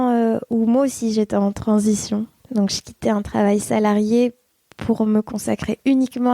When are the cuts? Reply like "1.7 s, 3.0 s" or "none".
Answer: 2.4 s